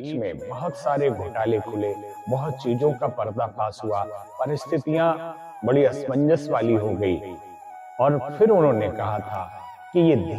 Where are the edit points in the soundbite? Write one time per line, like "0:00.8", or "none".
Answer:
none